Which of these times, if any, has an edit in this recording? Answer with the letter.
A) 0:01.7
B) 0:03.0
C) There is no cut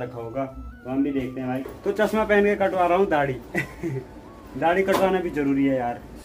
A